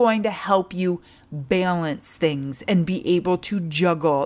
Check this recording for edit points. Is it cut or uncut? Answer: uncut